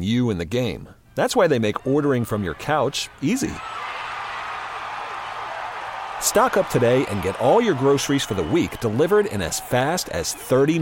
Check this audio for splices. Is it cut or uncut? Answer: uncut